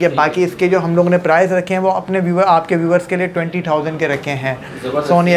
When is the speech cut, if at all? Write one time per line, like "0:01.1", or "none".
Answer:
none